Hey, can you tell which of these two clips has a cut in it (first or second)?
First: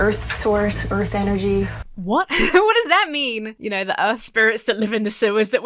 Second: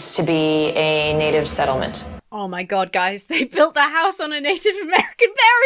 first